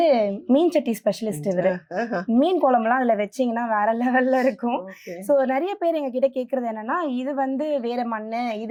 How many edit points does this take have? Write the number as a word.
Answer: zero